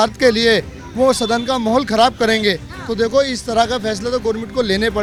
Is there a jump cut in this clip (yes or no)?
no